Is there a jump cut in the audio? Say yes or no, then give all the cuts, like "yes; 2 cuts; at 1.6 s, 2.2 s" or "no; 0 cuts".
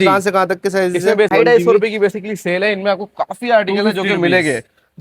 yes; 1 cut; at 1.3 s